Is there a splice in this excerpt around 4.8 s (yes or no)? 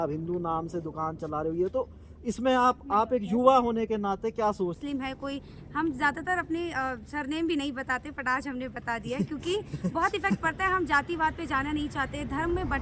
yes